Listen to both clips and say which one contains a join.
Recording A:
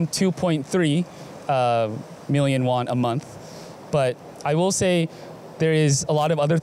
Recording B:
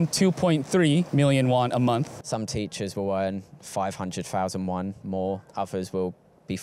B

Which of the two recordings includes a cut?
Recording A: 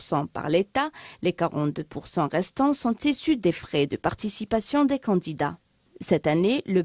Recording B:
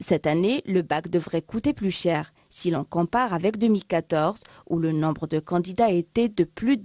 A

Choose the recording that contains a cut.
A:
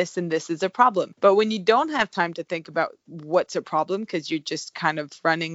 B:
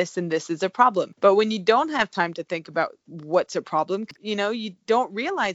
B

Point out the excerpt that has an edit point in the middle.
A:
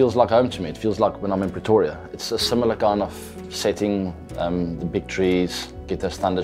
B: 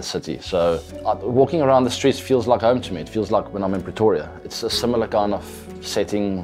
B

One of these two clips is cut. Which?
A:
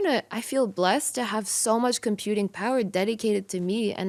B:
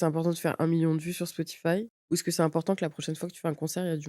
B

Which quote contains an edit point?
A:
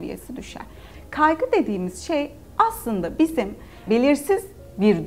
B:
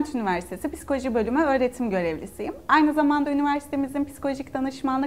A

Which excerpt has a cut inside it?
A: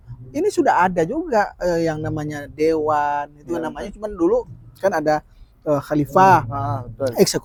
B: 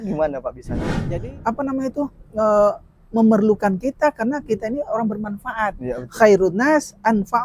B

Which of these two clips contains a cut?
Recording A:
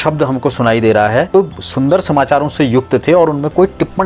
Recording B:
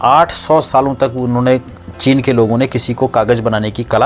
A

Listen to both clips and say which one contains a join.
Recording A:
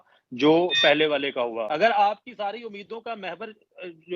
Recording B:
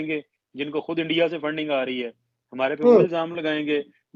A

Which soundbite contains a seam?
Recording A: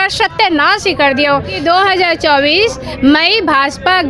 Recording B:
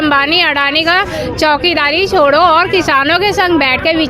A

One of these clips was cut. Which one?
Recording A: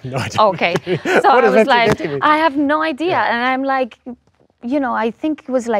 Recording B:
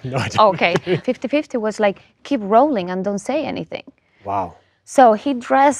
B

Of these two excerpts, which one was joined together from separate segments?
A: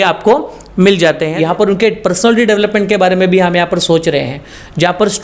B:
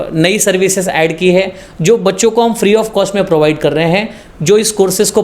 A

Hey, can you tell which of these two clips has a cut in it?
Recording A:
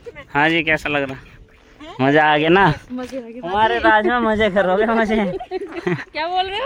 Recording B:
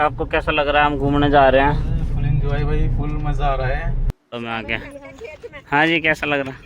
B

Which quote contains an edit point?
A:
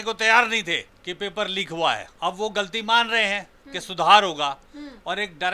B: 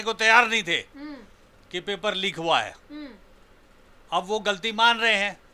A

